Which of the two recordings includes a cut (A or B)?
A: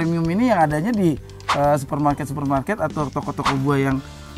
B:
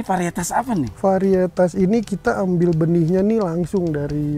B